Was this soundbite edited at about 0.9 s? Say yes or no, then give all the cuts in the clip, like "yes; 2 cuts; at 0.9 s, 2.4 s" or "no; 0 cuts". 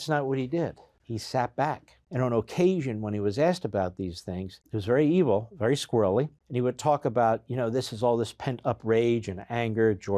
yes; 4 cuts; at 0.9 s, 1.9 s, 4.7 s, 6.4 s